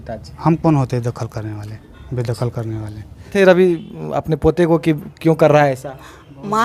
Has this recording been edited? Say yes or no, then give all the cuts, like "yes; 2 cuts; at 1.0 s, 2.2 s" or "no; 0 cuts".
yes; 1 cut; at 3.3 s